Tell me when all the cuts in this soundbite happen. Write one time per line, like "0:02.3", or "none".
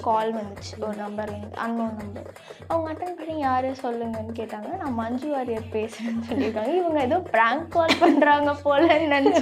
none